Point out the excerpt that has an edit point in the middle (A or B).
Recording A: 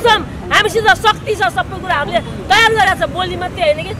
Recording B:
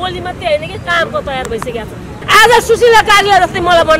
B